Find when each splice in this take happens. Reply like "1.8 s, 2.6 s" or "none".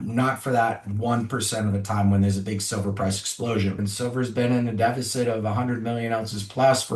3.9 s